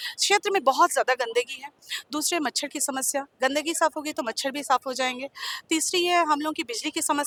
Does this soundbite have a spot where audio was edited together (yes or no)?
no